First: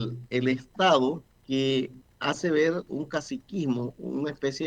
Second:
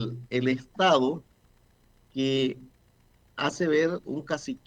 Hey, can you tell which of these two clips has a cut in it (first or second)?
first